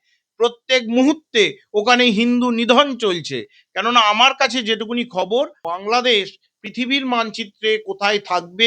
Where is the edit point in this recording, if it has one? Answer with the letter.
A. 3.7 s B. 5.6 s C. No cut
B